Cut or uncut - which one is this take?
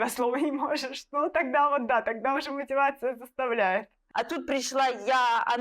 cut